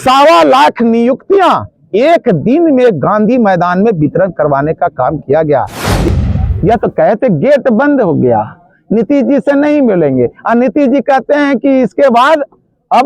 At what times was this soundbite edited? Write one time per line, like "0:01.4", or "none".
0:05.9

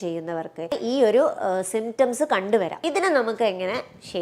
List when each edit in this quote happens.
0:00.8
0:02.8

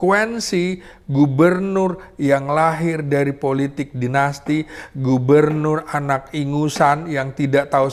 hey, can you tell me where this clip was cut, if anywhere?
none

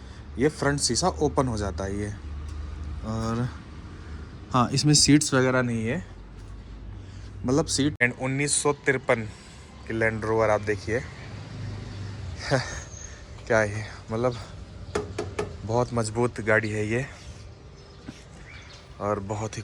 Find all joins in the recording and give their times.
0:08.0

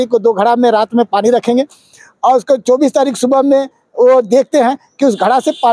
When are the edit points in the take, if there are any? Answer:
none

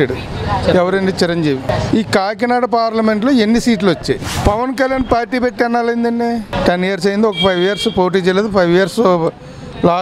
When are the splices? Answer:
0:01.7
0:04.3
0:06.5

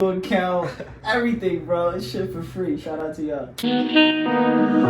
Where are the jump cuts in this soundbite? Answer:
0:03.5

